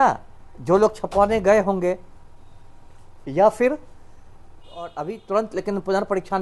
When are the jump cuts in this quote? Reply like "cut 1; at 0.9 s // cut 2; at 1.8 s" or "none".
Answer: cut 1; at 4.9 s